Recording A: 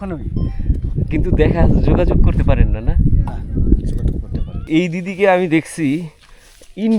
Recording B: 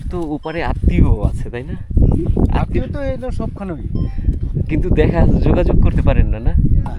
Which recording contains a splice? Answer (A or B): A